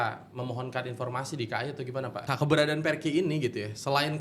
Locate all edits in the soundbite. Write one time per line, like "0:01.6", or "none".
0:02.2

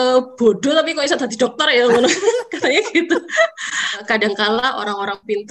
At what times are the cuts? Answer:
0:04.0

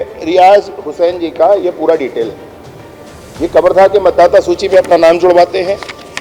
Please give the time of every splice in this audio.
none

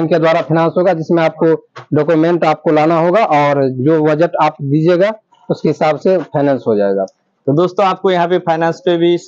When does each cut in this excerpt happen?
none

